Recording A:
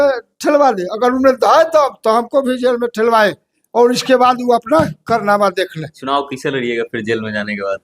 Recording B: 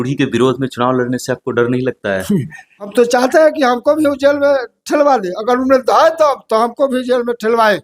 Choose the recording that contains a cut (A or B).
B